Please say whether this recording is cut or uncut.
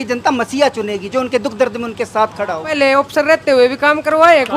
cut